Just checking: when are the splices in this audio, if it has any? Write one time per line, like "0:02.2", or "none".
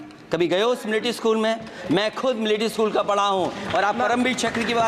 none

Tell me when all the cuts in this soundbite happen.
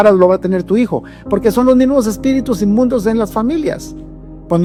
none

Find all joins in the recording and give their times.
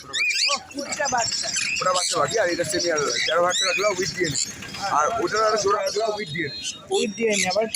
0:00.9
0:05.7

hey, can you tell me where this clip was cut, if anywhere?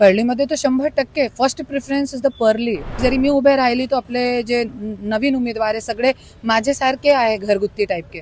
0:03.0

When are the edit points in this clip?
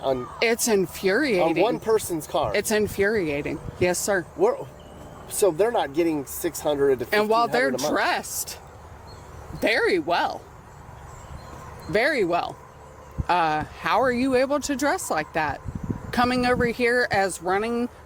none

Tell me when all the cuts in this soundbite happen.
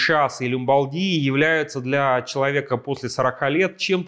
none

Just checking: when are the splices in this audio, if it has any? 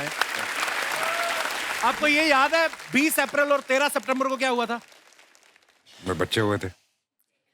0:01.6

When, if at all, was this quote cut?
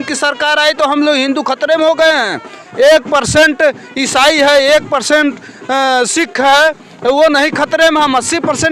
none

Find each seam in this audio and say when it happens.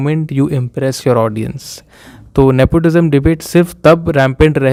none

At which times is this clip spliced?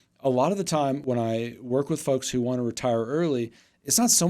0:01.0

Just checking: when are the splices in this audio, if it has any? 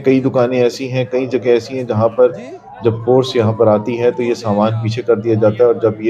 none

